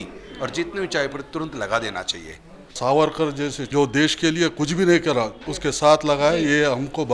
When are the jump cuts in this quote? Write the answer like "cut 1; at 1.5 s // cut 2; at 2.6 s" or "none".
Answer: cut 1; at 2.8 s // cut 2; at 3.6 s // cut 3; at 5.4 s